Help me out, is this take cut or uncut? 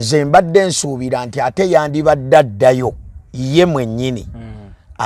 uncut